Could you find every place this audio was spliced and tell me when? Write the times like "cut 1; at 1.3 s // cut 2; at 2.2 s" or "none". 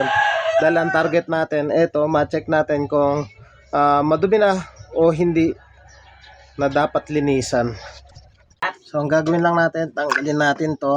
cut 1; at 8.6 s